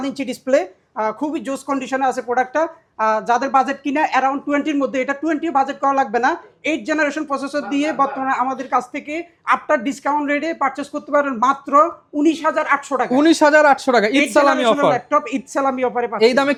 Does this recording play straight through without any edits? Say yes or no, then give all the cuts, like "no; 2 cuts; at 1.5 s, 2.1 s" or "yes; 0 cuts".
yes; 0 cuts